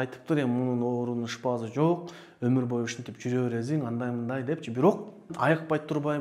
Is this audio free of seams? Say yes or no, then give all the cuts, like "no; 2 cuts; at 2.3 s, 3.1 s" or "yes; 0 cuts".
no; 1 cut; at 5.3 s